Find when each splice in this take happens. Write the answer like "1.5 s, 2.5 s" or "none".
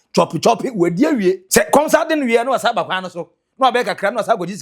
1.4 s